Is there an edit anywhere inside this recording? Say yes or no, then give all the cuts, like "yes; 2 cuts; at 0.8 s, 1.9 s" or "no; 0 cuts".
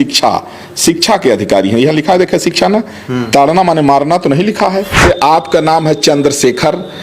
yes; 1 cut; at 5.0 s